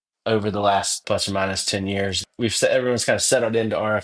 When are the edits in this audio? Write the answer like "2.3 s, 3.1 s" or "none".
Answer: 1.0 s, 2.3 s